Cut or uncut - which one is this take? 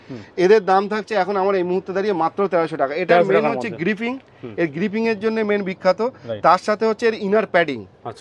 uncut